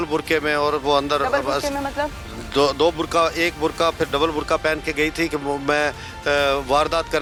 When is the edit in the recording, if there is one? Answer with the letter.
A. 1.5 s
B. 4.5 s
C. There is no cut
C